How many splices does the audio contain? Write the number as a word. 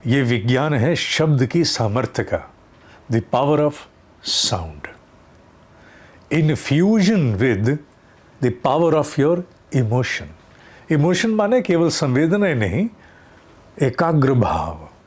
zero